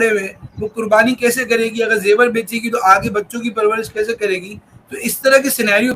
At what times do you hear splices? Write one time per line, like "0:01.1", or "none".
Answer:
none